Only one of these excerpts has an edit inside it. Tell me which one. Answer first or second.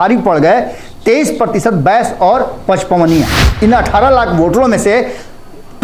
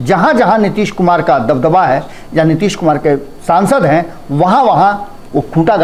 first